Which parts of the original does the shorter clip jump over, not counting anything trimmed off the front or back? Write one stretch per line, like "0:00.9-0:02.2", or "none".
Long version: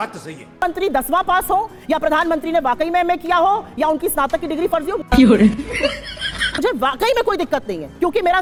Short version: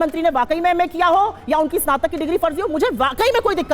0:05.0-0:06.5

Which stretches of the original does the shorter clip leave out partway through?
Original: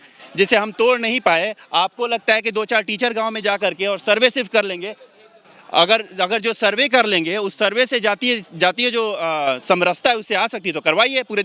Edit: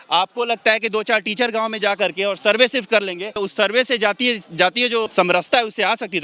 0:05.0-0:07.4
0:09.1-0:09.6

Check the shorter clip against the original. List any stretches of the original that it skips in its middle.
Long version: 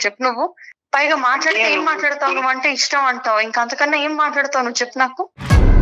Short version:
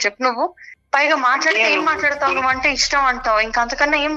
none

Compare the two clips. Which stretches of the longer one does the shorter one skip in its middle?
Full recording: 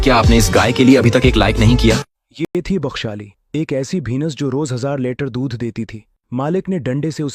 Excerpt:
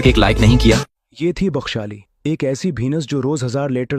0:02.4-0:02.5

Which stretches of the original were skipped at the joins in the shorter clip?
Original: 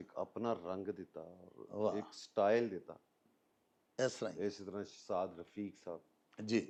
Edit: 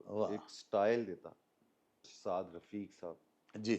0:03.7-0:04.9

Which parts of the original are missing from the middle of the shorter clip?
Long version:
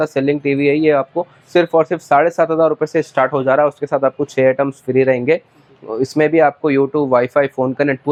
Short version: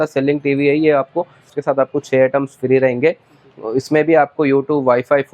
0:01.5-0:03.7

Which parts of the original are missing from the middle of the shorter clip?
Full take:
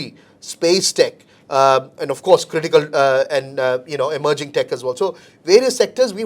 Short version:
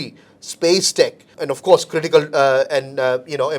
0:01.3-0:01.9

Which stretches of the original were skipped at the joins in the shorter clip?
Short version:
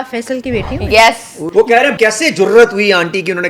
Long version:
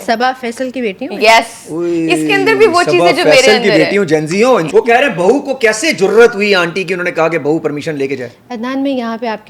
0:02.1-0:05.4

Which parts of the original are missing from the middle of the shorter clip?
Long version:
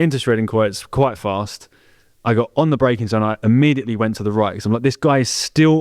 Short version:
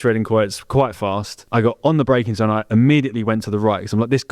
0:01.6-0:02.1

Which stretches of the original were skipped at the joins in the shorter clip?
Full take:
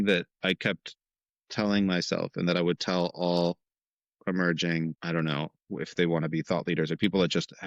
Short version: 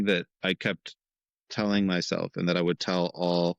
none

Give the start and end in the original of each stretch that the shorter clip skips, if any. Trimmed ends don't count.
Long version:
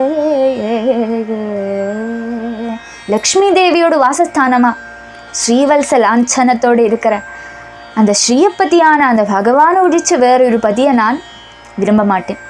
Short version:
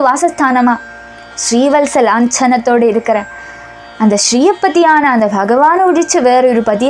none

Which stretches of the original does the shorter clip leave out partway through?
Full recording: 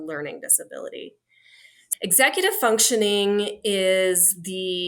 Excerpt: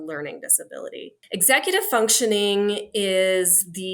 0:01.1-0:01.9

